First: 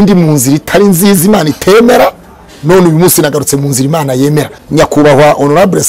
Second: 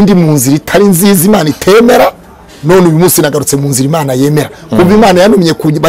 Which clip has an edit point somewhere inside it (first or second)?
first